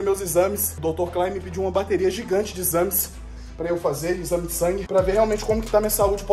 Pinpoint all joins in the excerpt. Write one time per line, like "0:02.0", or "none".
none